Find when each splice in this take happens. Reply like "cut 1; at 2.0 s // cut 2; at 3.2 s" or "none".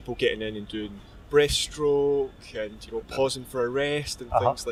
none